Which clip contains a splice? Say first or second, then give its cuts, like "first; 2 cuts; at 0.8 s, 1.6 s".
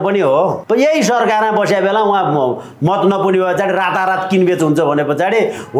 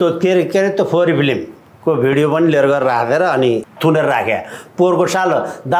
second; 1 cut; at 3.7 s